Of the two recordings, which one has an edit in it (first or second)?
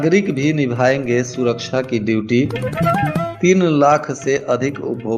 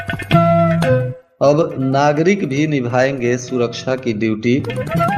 second